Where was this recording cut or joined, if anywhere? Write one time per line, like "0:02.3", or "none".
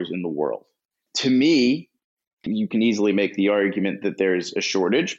0:01.0
0:02.4